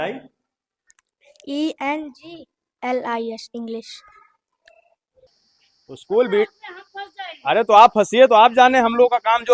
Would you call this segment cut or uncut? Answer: cut